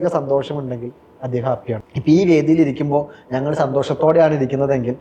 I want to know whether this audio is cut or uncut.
cut